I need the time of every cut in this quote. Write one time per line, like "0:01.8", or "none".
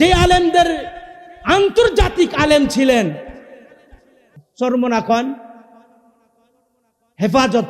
0:04.3